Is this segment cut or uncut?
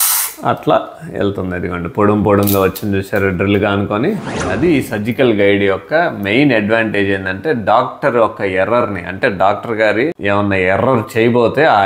cut